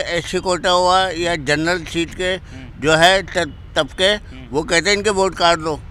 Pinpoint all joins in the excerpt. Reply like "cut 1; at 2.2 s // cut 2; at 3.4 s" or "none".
none